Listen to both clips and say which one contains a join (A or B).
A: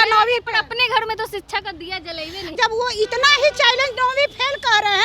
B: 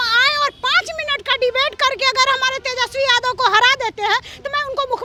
A